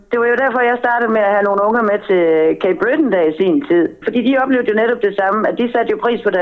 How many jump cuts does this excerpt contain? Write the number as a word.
one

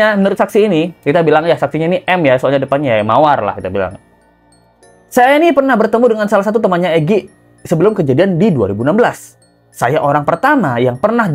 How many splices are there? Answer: zero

